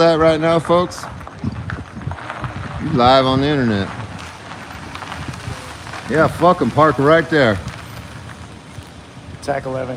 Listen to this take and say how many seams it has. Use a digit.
0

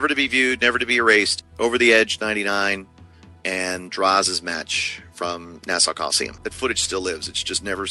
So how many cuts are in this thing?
1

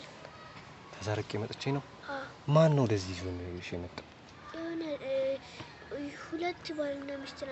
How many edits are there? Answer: 0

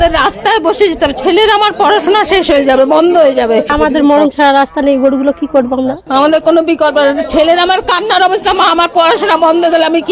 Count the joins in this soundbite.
2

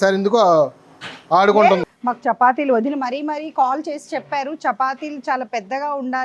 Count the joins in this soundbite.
1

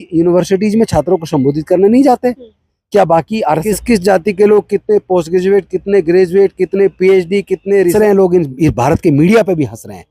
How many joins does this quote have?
2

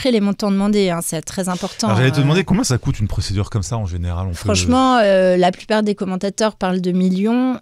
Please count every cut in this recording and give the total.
0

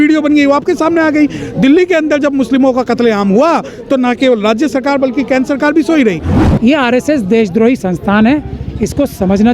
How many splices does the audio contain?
1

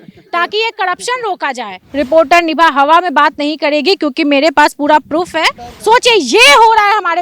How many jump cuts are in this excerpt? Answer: 2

